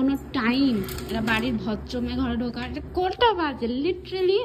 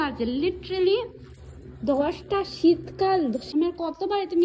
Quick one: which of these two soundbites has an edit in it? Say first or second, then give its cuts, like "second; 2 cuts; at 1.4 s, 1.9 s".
second; 1 cut; at 3.4 s